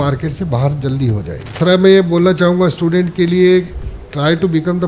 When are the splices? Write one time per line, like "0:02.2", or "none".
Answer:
0:01.5
0:03.8